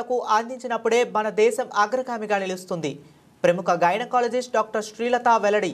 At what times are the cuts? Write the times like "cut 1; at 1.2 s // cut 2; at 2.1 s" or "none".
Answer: none